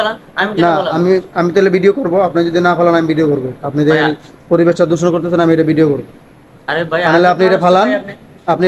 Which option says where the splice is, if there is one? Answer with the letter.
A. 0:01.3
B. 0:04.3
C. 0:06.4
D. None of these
D